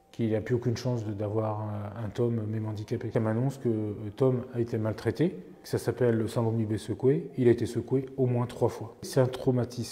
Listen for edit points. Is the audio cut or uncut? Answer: cut